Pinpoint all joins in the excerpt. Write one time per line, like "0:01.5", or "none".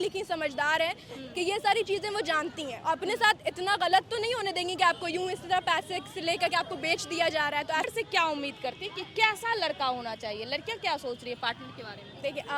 0:07.9